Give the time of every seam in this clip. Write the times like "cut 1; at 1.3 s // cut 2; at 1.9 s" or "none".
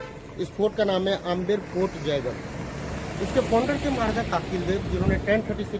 none